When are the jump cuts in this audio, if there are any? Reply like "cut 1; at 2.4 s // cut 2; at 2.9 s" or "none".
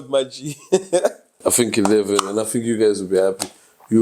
cut 1; at 1.4 s